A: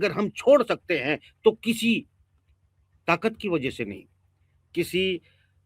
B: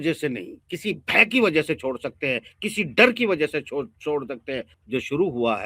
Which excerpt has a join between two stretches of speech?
B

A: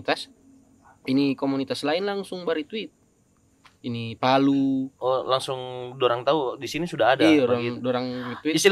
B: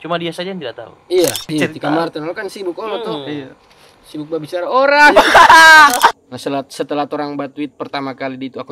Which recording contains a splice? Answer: B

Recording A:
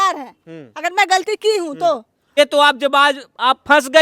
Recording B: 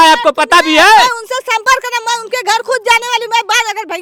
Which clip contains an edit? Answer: A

